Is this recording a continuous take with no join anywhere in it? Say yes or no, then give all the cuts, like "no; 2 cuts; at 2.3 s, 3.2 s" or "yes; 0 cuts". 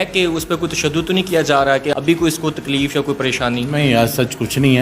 yes; 0 cuts